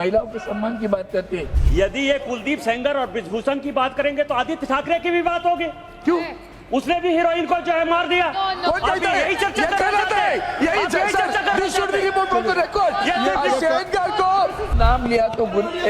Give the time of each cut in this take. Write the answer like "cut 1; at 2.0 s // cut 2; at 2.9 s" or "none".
cut 1; at 1.6 s // cut 2; at 14.7 s